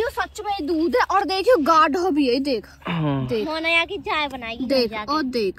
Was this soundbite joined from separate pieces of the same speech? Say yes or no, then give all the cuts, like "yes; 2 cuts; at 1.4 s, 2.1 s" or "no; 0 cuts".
no; 0 cuts